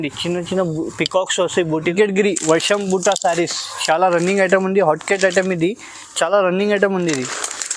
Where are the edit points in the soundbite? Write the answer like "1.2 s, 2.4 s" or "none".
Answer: 1.9 s

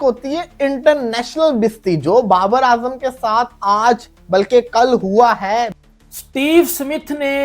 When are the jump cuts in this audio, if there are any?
5.8 s

